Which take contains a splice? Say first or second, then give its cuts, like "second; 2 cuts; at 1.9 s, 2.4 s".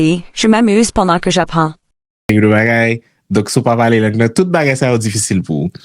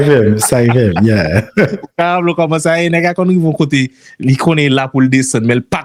first; 1 cut; at 2.3 s